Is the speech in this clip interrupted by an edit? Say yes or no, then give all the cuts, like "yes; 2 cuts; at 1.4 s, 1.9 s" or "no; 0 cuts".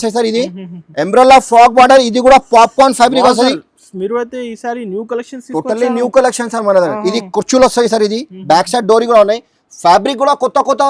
no; 0 cuts